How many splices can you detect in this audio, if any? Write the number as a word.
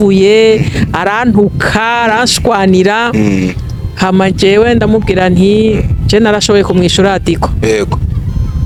zero